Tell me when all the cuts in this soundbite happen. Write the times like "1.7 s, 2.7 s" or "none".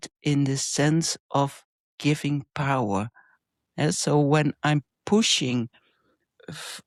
none